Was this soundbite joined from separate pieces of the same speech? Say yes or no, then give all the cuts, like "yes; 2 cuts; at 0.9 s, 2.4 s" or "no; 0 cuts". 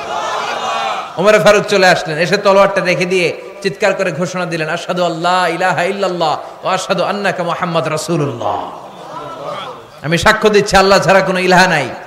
no; 0 cuts